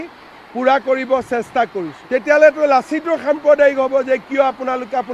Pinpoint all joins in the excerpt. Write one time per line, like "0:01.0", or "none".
0:02.0